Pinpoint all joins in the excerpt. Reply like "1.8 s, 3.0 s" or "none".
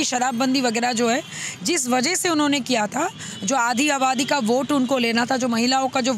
none

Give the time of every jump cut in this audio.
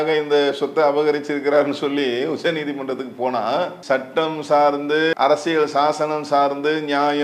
3.8 s, 5.1 s

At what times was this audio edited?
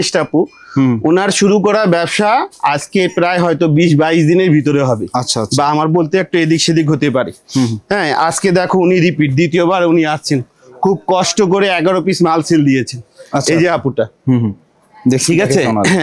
none

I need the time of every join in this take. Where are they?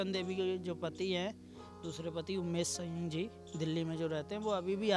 none

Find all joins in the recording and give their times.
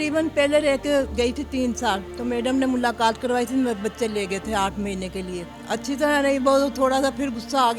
2.1 s, 5.5 s

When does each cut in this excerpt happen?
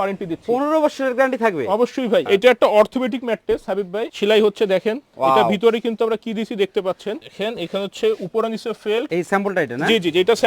2.2 s, 4.1 s, 7.3 s, 9.1 s

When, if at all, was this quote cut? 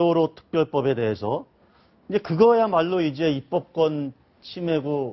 1.4 s

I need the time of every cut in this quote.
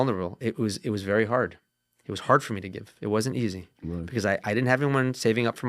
none

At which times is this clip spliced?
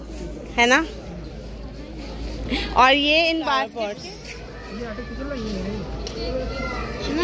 3.8 s

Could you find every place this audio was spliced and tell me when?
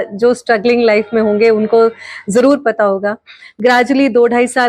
none

